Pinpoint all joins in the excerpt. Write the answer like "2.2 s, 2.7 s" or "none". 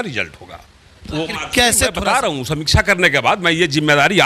2.0 s